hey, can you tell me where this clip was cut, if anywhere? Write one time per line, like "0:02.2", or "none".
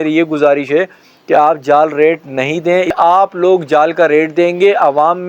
0:02.9